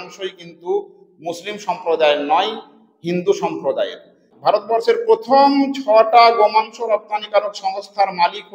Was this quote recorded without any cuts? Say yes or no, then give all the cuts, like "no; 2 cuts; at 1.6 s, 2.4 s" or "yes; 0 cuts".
no; 1 cut; at 4.2 s